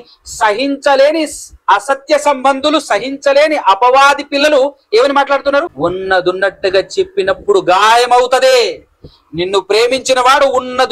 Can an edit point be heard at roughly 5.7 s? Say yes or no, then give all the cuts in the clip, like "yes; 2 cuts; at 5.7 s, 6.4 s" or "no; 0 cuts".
yes; 1 cut; at 5.7 s